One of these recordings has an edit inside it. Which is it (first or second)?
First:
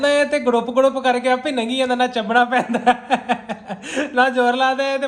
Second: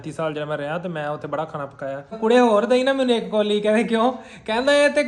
second